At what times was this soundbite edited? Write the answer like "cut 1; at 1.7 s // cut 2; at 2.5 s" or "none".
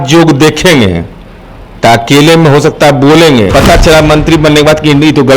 cut 1; at 3.5 s